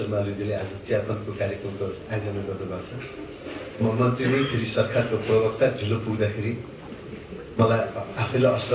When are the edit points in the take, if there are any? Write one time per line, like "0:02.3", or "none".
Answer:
none